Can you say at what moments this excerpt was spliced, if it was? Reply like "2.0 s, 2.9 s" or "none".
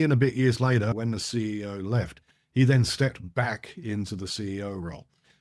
0.9 s